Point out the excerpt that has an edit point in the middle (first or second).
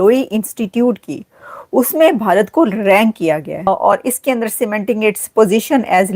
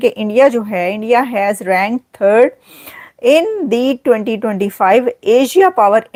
first